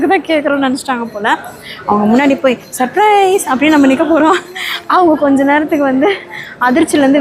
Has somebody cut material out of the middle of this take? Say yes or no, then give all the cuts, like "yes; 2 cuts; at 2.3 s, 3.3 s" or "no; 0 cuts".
no; 0 cuts